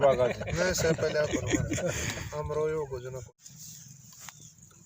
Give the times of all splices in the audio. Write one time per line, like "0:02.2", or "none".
0:03.2